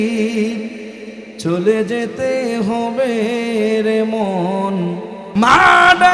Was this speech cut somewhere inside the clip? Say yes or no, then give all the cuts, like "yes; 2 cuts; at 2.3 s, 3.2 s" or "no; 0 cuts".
yes; 1 cut; at 5.2 s